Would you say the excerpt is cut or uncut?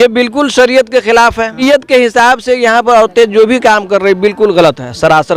cut